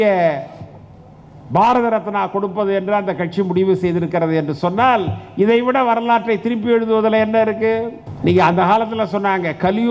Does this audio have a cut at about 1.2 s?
no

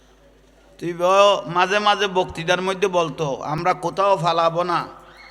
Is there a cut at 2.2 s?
no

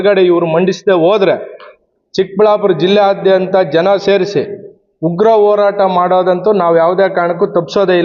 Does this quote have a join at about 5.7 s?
no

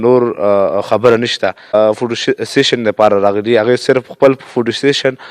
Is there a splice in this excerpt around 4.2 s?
no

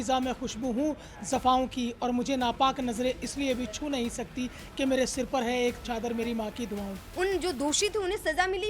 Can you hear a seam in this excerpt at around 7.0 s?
yes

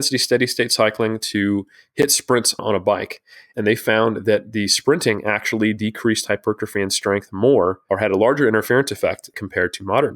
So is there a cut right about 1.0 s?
no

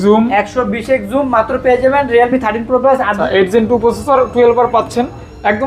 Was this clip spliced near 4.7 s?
no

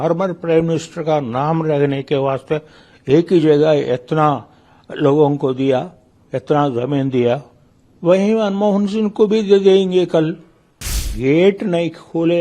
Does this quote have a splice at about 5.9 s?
no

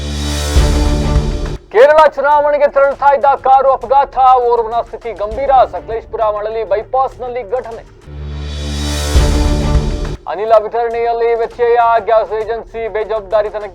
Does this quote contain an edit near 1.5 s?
yes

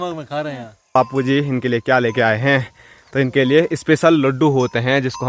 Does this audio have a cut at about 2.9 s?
no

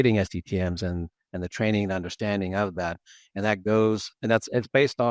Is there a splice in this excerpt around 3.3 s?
no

